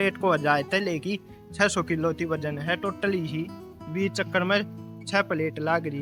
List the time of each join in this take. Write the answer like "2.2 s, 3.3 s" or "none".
none